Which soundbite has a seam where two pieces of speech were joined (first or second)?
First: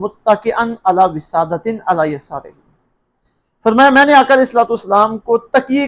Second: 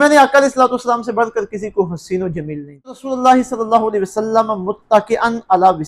second